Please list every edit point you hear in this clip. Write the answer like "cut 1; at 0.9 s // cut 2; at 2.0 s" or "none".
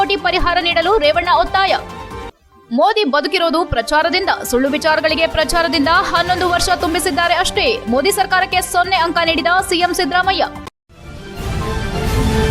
cut 1; at 10.6 s